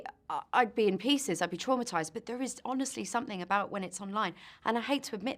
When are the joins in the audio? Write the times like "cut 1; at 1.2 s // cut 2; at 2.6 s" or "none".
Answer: none